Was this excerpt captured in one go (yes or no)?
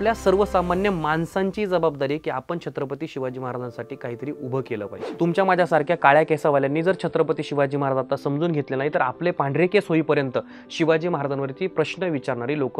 no